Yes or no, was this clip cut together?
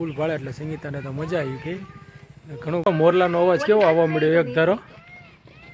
yes